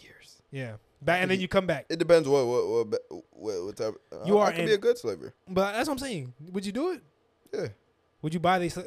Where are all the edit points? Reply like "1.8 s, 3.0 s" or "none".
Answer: 5.3 s

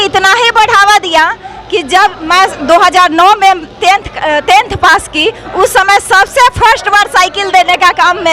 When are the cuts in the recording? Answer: none

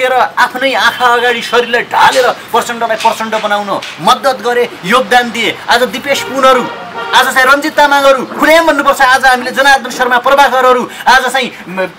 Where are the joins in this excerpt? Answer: none

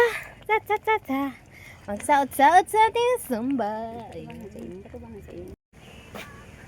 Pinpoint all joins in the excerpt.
5.6 s

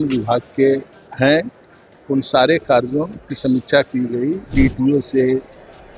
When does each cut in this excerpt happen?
1.0 s, 4.4 s

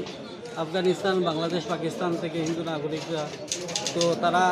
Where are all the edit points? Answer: none

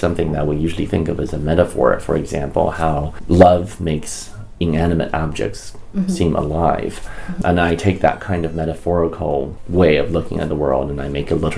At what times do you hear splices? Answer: 3.1 s, 7.4 s, 9.6 s

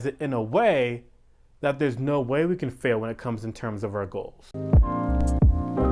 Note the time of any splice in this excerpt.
4.5 s

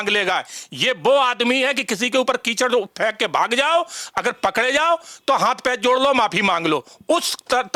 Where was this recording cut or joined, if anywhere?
none

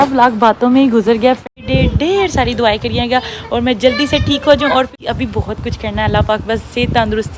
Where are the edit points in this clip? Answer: 1.4 s, 4.9 s

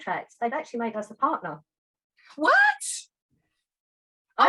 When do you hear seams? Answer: none

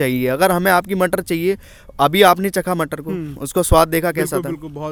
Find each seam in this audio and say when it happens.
none

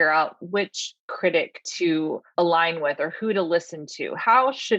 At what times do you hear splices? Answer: 2.2 s

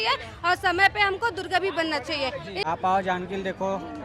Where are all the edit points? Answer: 2.6 s

